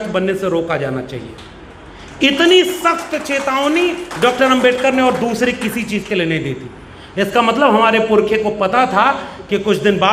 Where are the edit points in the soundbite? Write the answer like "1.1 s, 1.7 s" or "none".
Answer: none